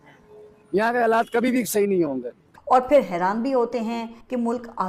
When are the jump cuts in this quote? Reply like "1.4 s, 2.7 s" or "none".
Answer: 2.6 s